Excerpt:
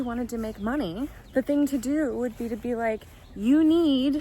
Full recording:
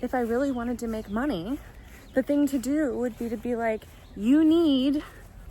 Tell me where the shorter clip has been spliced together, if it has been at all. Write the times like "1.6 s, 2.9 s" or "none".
1.2 s